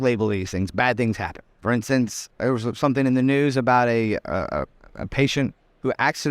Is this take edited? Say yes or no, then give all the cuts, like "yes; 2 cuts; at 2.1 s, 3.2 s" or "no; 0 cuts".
yes; 2 cuts; at 1.5 s, 2.3 s